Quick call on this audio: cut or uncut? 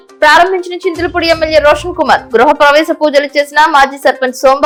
uncut